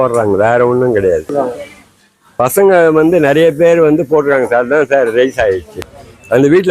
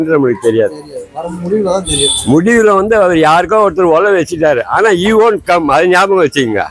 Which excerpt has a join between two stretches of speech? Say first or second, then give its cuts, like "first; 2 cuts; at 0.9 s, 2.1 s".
first; 2 cuts; at 1.3 s, 5.7 s